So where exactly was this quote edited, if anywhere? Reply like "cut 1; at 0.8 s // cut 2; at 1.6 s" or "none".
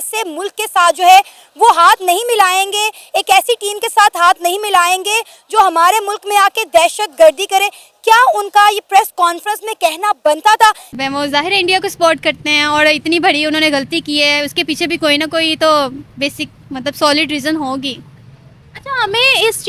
cut 1; at 10.9 s